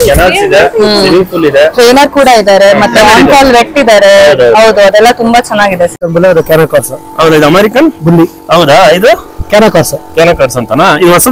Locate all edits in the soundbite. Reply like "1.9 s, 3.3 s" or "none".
6.0 s